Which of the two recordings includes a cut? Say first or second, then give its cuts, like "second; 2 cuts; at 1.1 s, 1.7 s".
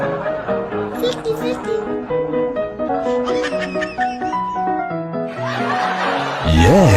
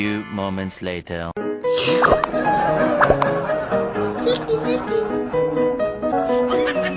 second; 1 cut; at 1.3 s